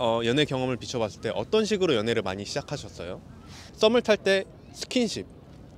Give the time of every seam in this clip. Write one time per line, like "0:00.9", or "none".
0:03.6